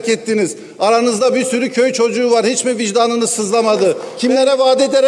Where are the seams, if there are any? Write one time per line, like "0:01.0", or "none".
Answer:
0:04.1